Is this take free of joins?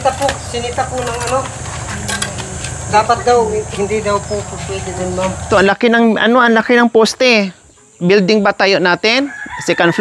no; 1 cut; at 5.5 s

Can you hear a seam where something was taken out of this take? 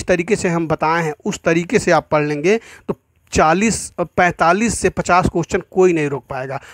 no; 0 cuts

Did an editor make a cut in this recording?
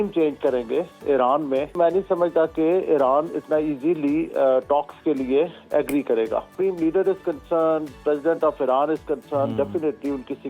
yes; 2 cuts; at 1.8 s, 6.5 s

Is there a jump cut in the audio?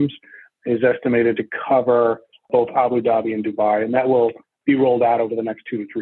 no; 0 cuts

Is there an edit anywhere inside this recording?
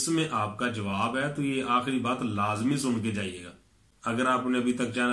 no; 0 cuts

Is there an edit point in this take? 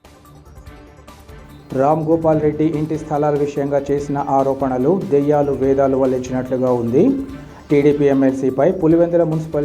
no; 0 cuts

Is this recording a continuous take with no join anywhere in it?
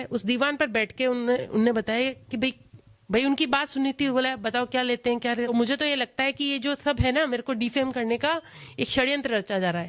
no; 1 cut; at 5.5 s

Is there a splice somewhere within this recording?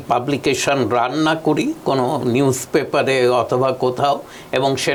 no; 0 cuts

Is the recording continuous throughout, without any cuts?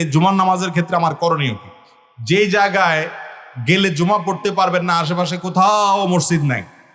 yes; 0 cuts

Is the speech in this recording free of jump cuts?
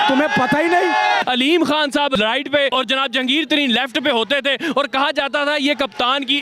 no; 2 cuts; at 1.2 s, 2.6 s

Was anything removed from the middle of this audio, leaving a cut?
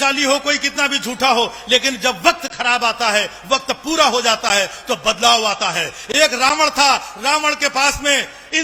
no; 0 cuts

